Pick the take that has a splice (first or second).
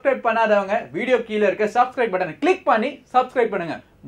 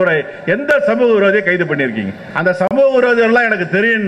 second